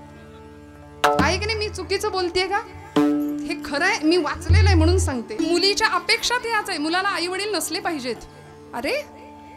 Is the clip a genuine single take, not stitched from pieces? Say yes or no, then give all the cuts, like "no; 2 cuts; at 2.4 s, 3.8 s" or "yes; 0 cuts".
yes; 0 cuts